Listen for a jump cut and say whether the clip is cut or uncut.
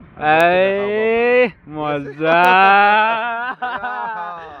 uncut